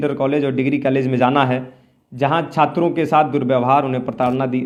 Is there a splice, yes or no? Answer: no